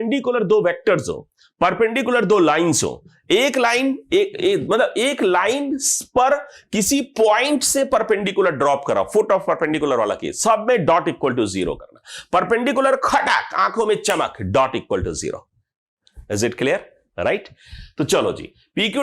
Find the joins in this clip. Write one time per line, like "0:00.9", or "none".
none